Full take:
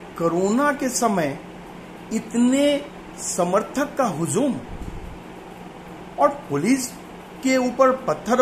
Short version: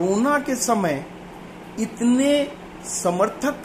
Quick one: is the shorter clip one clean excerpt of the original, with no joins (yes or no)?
yes